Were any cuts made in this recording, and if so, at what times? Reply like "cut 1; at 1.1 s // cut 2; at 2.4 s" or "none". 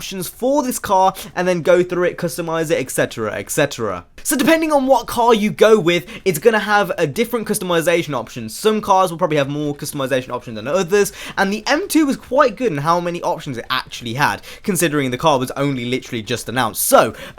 cut 1; at 8.8 s